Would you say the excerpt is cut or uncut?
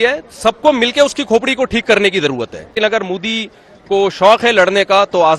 cut